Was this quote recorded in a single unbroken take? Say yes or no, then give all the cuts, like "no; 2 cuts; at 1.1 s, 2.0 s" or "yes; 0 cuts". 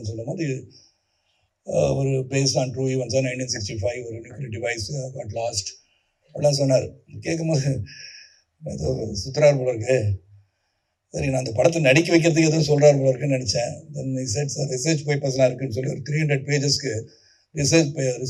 yes; 0 cuts